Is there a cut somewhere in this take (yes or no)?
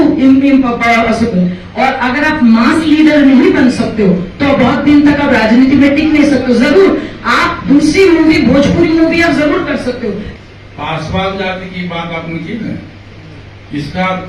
yes